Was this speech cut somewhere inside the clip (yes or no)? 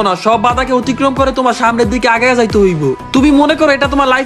yes